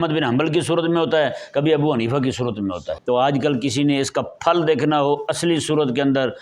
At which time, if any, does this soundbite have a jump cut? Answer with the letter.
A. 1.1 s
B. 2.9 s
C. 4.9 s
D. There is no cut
B